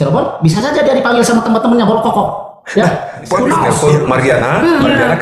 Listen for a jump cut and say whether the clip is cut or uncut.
cut